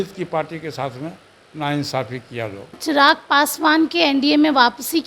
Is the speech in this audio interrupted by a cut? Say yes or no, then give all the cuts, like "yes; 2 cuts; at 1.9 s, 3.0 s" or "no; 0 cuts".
yes; 1 cut; at 2.8 s